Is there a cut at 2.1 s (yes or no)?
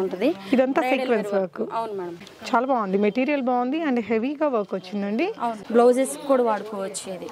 yes